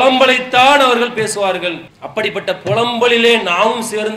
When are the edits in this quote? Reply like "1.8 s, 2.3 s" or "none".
none